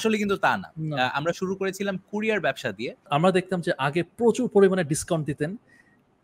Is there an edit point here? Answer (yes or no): yes